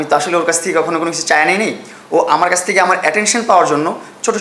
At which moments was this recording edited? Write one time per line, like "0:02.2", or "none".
none